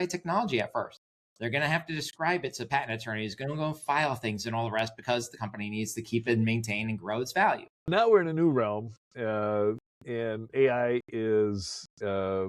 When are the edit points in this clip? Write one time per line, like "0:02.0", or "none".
0:07.9